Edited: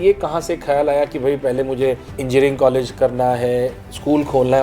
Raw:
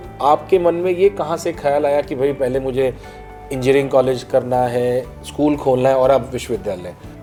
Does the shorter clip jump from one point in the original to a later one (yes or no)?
yes